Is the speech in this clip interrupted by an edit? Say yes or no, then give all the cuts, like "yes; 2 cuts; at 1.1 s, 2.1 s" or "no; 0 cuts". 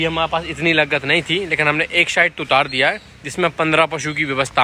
no; 0 cuts